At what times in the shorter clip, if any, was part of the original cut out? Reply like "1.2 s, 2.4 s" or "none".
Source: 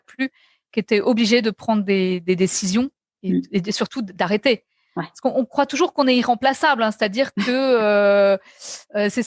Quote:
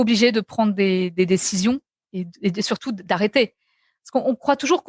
none